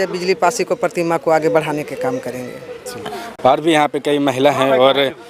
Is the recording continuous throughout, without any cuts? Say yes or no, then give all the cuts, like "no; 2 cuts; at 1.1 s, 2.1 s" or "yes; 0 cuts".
yes; 0 cuts